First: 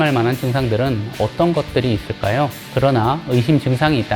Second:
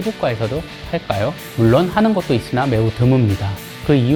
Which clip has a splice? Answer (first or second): first